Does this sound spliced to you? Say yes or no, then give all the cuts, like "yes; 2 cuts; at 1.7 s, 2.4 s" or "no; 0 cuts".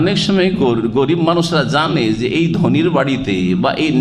no; 0 cuts